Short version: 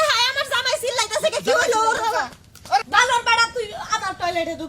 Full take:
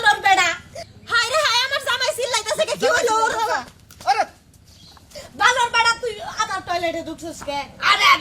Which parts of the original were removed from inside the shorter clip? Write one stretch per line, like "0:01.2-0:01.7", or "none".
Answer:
0:04.2-0:05.3